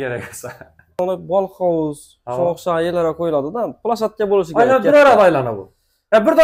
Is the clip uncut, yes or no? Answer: no